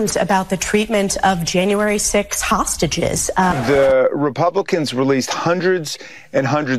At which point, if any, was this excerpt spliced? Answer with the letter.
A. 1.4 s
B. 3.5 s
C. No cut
B